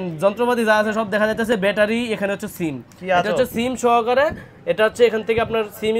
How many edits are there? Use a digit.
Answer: 0